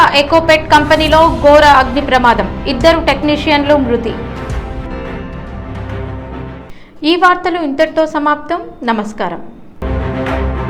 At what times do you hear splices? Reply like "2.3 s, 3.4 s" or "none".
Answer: none